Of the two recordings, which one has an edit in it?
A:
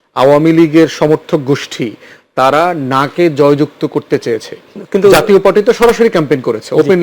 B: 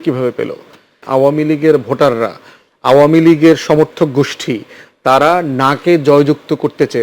B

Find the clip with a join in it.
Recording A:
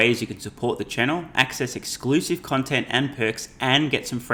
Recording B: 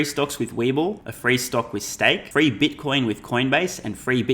B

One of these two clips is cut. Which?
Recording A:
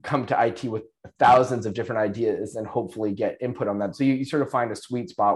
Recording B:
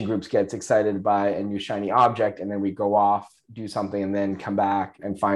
A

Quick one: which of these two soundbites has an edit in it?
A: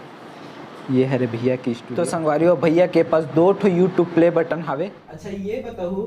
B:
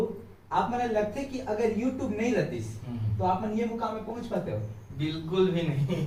A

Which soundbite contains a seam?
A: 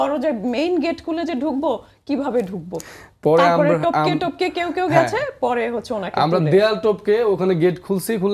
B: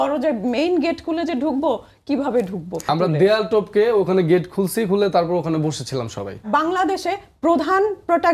B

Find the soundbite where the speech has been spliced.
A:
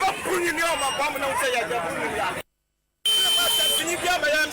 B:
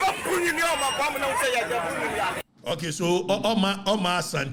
A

